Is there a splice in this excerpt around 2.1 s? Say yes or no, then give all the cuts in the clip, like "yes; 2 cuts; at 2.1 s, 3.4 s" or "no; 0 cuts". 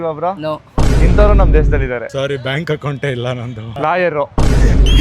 yes; 1 cut; at 2.1 s